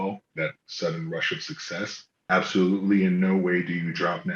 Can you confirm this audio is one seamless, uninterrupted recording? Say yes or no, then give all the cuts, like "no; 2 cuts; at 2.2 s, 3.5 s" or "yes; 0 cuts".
no; 1 cut; at 2.1 s